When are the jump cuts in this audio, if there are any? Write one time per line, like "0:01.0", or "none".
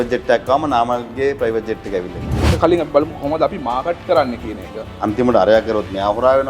0:02.5
0:04.9